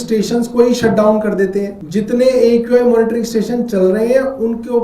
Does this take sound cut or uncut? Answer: cut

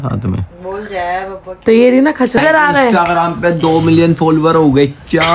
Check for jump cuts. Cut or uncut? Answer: cut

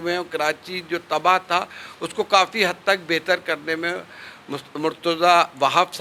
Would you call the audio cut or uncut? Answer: uncut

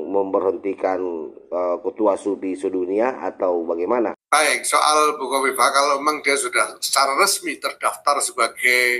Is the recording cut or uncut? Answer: cut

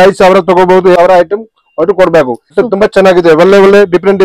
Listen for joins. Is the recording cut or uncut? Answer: cut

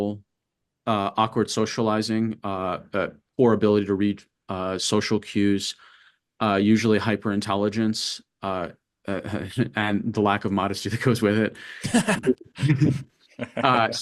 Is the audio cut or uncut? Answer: uncut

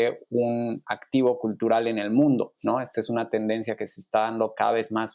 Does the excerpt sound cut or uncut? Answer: cut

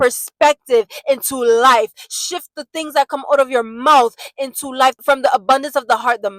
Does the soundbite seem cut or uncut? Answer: cut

